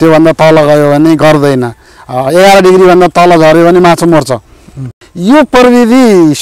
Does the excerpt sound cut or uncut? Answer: cut